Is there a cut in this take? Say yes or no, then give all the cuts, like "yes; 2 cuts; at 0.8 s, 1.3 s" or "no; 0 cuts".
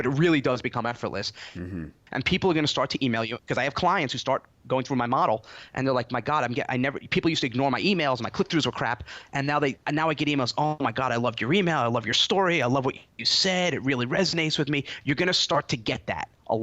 yes; 1 cut; at 9.8 s